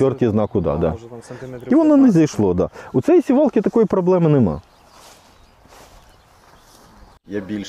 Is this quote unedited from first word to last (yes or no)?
yes